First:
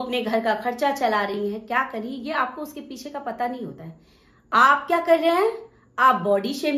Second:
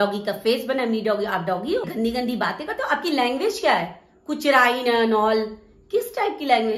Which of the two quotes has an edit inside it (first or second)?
second